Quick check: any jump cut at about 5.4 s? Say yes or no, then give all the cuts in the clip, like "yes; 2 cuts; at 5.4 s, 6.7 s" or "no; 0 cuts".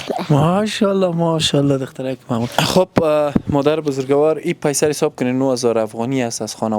no; 1 cut; at 2.5 s